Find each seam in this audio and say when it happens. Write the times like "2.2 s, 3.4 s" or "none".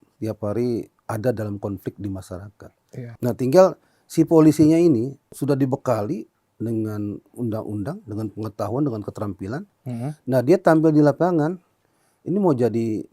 1.0 s, 3.0 s, 5.2 s